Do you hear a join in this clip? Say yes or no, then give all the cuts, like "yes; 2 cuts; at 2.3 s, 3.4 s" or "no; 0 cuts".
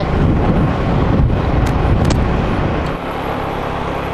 yes; 1 cut; at 2.9 s